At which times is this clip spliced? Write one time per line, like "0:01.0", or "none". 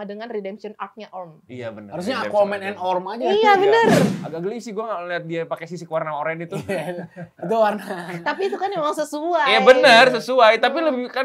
0:04.1